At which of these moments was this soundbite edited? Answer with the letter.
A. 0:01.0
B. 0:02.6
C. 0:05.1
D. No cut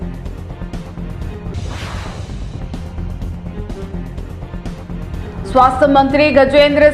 C